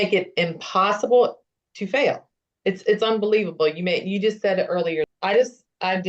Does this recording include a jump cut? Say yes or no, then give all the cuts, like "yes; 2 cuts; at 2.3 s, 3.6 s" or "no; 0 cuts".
yes; 1 cut; at 5.1 s